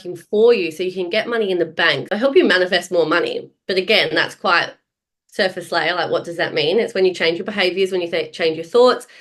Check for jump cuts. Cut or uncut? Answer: cut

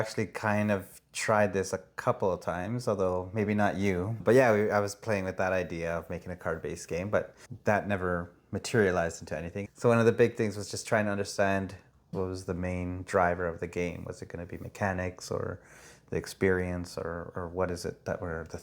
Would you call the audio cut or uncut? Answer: cut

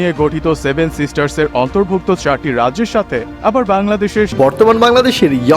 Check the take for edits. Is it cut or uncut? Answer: cut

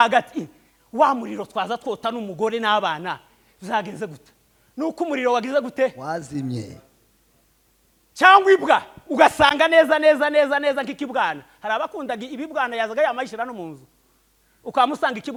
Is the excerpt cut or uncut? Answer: uncut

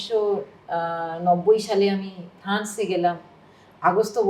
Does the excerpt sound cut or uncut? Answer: uncut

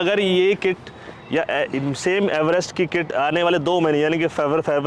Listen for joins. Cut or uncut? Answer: uncut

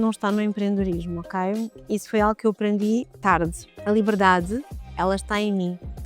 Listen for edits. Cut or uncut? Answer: cut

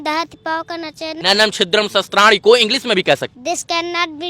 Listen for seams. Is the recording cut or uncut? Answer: cut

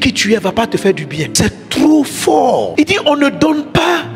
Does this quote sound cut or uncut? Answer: cut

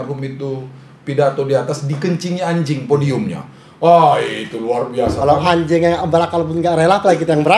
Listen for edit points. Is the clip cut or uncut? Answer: uncut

